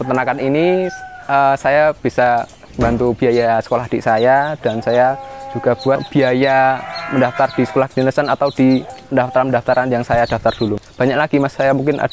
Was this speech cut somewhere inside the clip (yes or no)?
yes